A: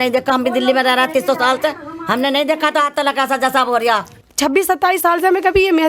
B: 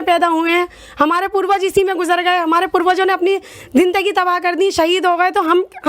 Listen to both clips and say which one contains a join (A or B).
A